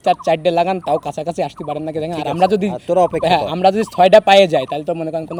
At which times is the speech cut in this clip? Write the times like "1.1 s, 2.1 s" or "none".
none